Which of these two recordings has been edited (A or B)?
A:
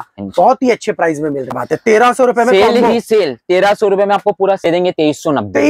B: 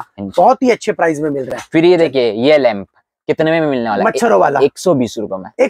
A